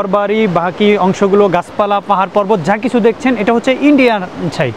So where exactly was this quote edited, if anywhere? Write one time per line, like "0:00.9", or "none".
none